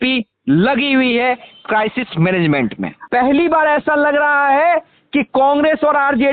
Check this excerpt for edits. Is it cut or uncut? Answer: cut